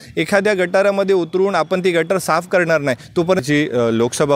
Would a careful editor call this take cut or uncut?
cut